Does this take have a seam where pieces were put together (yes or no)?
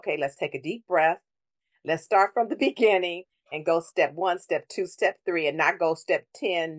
no